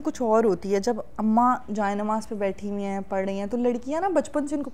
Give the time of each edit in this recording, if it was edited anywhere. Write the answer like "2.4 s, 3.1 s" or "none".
none

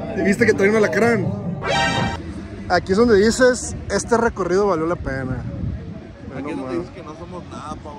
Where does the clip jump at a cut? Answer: 2.1 s

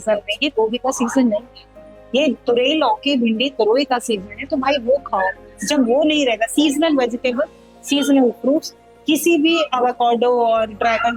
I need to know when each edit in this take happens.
none

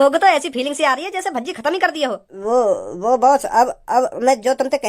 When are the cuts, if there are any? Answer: 2.3 s

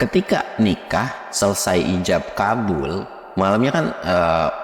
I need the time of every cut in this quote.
3.2 s

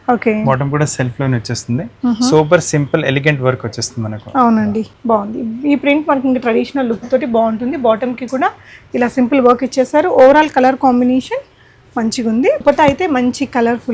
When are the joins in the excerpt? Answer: 4.9 s, 12.6 s

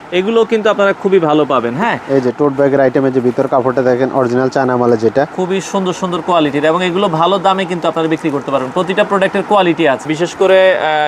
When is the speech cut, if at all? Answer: 2.0 s, 5.3 s, 10.1 s

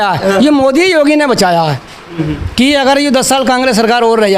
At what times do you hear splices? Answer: 2.2 s

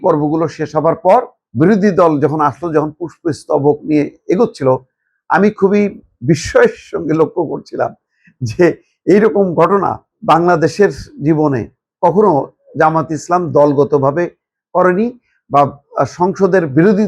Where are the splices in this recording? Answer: 1.4 s, 10.1 s

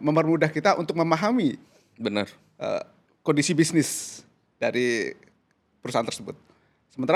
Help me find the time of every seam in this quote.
none

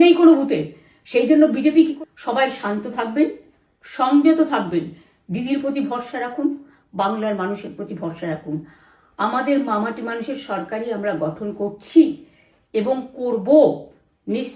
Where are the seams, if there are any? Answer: 1.9 s

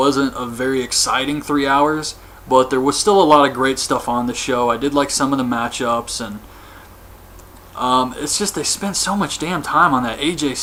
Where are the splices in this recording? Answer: none

